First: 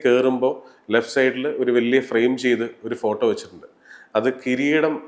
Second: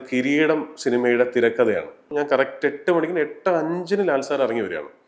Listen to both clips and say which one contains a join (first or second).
second